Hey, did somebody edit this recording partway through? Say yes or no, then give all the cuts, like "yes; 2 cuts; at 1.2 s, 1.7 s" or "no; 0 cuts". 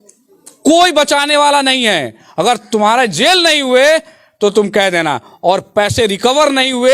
no; 0 cuts